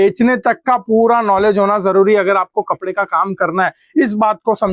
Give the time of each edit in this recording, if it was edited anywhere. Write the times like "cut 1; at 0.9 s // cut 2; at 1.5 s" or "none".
none